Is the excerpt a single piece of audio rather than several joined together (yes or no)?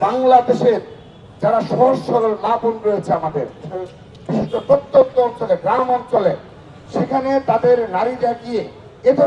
yes